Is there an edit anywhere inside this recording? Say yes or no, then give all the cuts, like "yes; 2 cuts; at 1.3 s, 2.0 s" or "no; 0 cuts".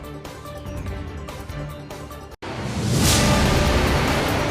yes; 1 cut; at 2.3 s